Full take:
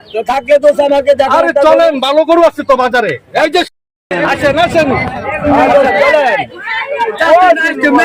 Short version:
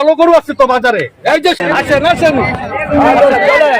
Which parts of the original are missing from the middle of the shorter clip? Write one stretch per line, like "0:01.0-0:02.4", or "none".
0:03.7-0:04.1